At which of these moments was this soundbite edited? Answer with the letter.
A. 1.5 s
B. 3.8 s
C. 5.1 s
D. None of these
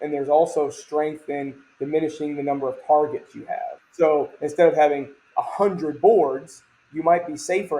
B